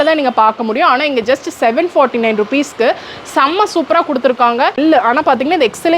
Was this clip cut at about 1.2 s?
no; 1 cut; at 4.8 s

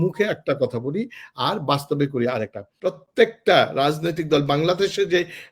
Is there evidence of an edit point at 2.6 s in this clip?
yes; 1 cut; at 2.6 s

